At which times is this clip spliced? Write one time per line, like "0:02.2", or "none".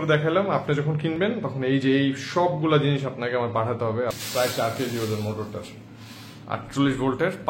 0:04.2